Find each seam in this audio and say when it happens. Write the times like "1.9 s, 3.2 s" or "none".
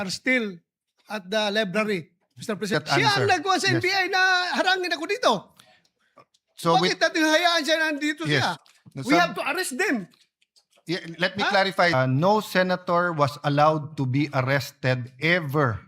2.7 s, 8.6 s, 11.9 s